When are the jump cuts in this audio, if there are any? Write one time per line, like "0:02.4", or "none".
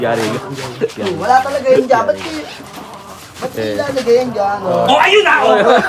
none